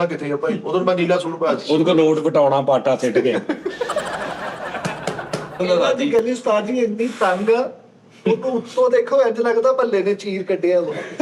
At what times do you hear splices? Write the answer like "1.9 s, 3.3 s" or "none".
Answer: 5.6 s